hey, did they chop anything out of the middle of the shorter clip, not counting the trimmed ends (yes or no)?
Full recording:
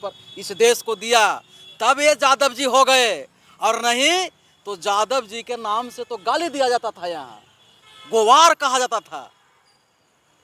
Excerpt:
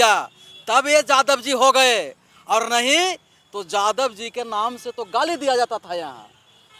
no